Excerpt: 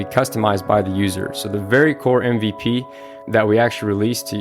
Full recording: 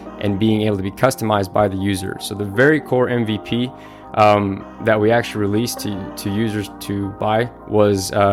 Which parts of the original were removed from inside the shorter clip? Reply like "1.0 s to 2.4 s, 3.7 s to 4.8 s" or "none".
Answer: 4.0 s to 4.6 s